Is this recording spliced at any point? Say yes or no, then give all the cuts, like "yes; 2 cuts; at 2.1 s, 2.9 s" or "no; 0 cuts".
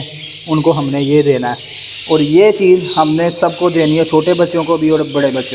no; 0 cuts